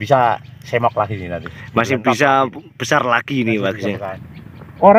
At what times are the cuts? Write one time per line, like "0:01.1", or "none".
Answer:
0:04.1